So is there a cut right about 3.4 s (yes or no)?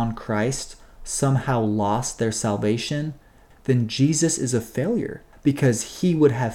yes